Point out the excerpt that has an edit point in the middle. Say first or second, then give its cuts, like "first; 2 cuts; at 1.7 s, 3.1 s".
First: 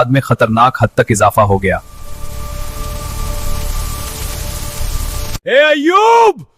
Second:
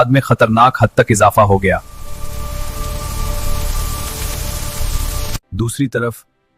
first; 1 cut; at 5.4 s